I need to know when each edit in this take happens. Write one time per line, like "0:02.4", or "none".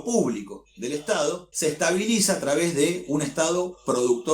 0:01.5